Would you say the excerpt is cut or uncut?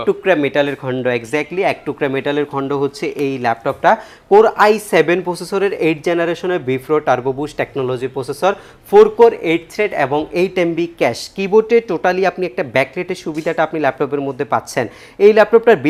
uncut